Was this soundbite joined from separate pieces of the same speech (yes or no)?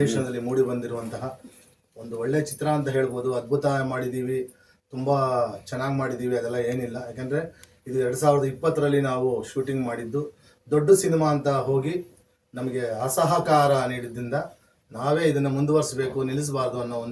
no